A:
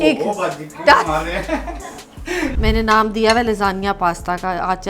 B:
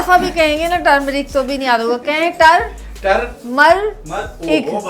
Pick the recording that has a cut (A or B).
A